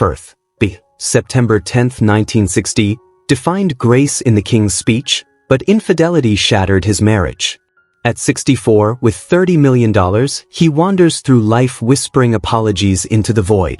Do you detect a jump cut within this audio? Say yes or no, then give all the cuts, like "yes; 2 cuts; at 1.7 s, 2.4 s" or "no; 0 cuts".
no; 0 cuts